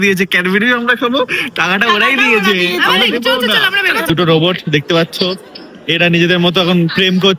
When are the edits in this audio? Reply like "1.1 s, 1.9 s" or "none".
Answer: 4.1 s